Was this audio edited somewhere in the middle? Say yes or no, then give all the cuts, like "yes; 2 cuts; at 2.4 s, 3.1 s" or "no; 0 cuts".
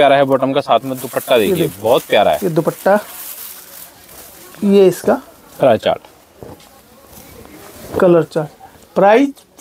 no; 0 cuts